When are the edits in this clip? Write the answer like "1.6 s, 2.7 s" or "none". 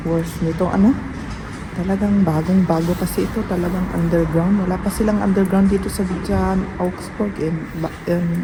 none